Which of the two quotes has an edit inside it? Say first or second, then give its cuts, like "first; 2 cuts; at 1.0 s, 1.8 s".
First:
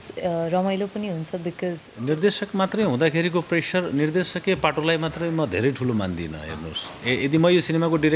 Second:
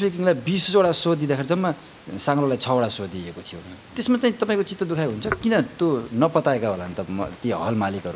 first; 1 cut; at 1.9 s